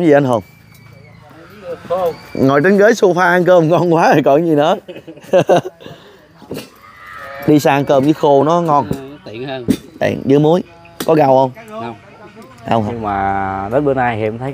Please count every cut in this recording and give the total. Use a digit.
1